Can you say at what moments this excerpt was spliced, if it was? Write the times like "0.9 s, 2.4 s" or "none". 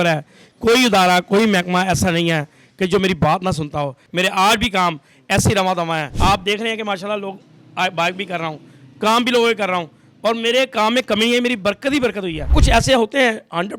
4.0 s, 6.1 s, 12.5 s